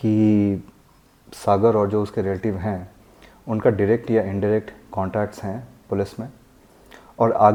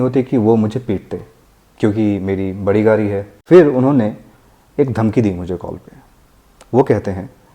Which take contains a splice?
second; 1 cut; at 3.3 s

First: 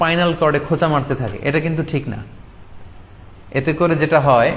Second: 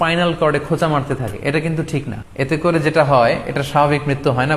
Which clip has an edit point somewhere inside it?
second; 1 cut; at 2.2 s

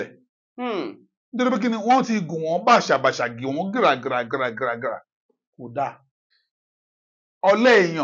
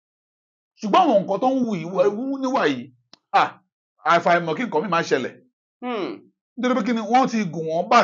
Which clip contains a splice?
first; 1 cut; at 6.1 s

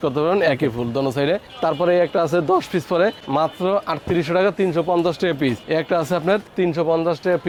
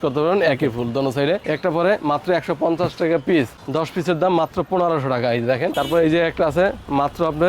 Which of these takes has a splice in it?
second; 2 cuts; at 1.5 s, 5.7 s

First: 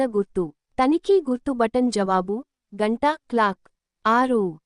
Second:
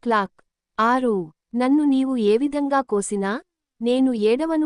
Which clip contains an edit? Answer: first; 2 cuts; at 0.9 s, 2.2 s

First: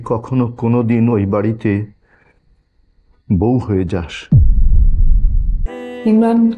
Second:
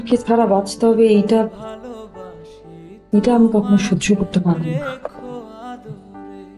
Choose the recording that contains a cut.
first; 1 cut; at 5.6 s

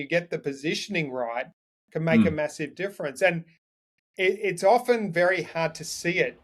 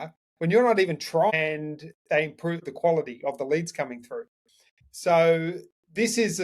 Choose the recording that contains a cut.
second; 2 cuts; at 1.3 s, 2.6 s

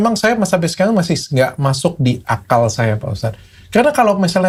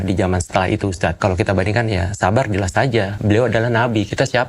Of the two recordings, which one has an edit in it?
second; 2 cuts; at 1.2 s, 3.1 s

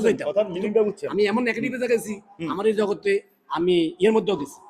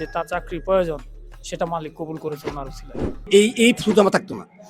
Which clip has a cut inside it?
second; 1 cut; at 3.3 s

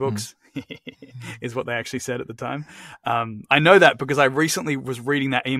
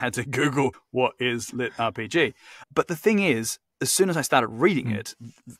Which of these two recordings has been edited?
second; 2 cuts; at 0.8 s, 2.5 s

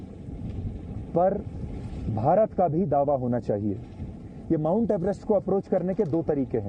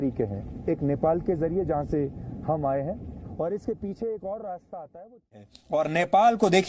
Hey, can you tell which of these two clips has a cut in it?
second; 1 cut; at 5.5 s

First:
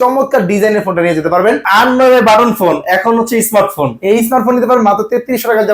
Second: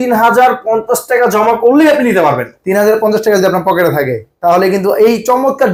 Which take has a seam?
first; 1 cut; at 1.6 s

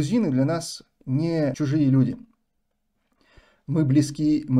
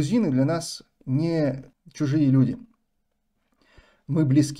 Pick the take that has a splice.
first; 1 cut; at 1.5 s

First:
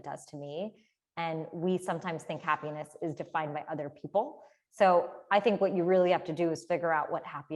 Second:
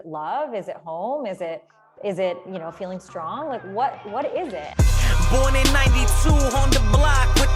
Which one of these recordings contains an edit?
second; 1 cut; at 4.7 s

